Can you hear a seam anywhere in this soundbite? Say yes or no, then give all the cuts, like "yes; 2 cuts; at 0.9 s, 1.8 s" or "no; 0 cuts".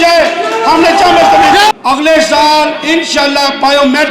yes; 1 cut; at 1.7 s